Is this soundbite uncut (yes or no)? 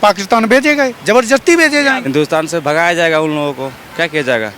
no